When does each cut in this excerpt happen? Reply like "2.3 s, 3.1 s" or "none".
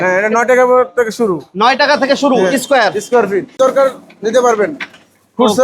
3.5 s